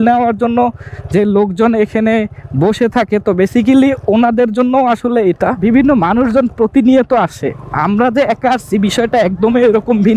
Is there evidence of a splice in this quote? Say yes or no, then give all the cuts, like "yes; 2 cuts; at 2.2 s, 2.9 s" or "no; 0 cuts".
no; 0 cuts